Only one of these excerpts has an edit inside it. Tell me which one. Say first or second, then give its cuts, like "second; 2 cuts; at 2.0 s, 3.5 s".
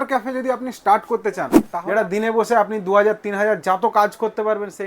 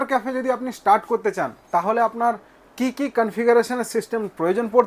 first; 1 cut; at 1.7 s